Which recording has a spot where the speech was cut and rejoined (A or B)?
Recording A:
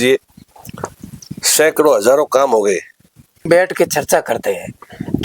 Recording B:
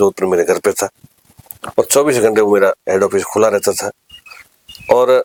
A